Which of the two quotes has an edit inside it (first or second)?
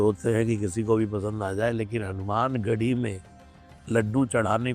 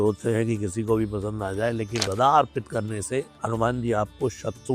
second